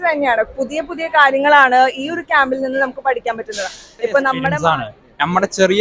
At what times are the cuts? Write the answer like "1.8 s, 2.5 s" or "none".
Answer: 4.5 s